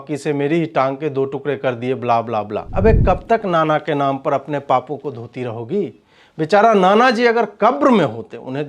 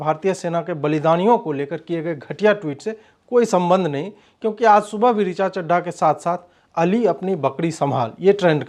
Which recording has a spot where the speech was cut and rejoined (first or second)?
first